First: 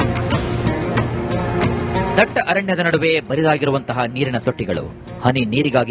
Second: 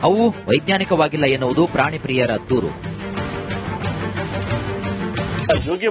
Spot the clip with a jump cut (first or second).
first